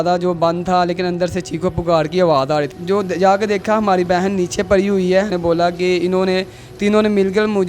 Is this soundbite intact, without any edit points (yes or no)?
no